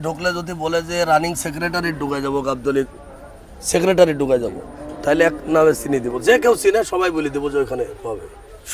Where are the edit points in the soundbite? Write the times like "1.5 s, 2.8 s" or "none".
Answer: none